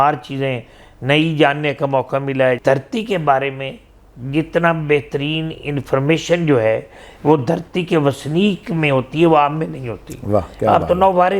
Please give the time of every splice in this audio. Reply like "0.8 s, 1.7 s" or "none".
2.6 s